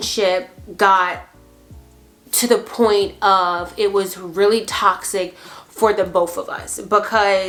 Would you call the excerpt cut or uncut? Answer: uncut